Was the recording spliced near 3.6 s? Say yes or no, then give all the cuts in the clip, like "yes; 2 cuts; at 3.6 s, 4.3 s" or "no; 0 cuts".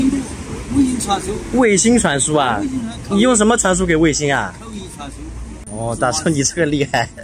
no; 1 cut; at 5.6 s